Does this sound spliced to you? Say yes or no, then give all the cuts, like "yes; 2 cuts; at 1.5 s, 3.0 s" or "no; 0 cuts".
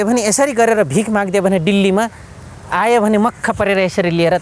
no; 0 cuts